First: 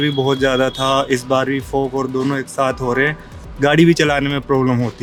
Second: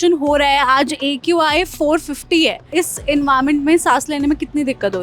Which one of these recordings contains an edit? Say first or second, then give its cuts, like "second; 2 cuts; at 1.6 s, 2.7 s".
second; 1 cut; at 2.7 s